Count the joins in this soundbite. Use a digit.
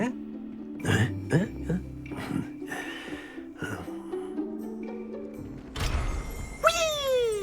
1